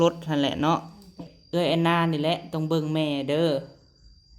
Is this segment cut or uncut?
cut